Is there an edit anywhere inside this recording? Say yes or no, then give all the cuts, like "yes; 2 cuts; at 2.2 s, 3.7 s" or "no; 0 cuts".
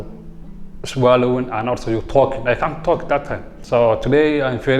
yes; 1 cut; at 3.5 s